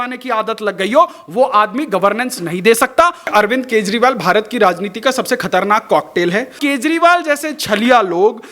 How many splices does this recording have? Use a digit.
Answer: 2